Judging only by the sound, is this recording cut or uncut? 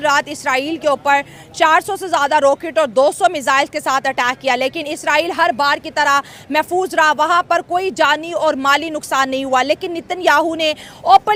uncut